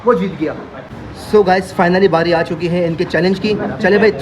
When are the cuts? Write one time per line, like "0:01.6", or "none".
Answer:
0:01.1